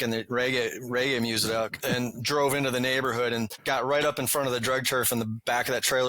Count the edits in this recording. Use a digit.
2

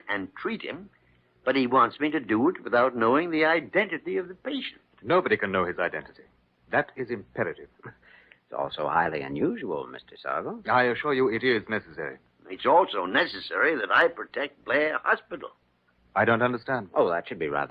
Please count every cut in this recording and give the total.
1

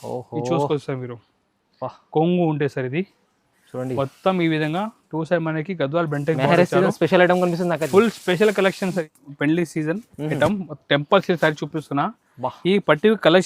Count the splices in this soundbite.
1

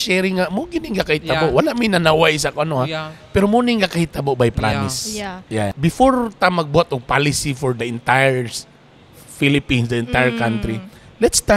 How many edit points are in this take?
1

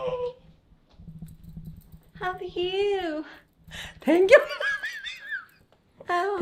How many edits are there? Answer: 0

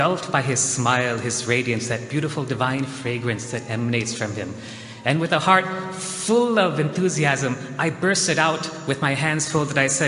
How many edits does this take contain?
1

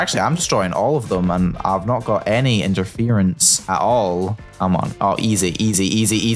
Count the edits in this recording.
2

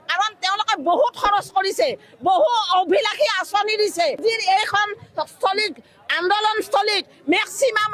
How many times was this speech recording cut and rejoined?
1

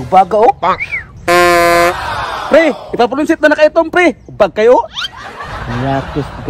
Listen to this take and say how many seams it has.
0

